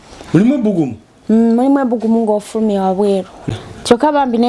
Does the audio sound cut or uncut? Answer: cut